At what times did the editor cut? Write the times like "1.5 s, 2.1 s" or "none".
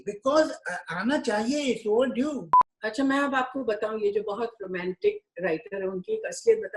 2.6 s